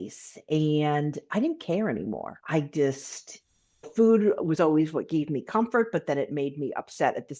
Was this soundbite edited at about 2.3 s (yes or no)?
yes